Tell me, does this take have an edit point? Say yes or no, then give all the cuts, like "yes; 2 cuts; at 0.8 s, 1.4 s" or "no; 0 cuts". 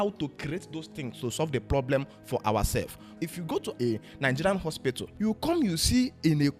yes; 2 cuts; at 3.2 s, 5.1 s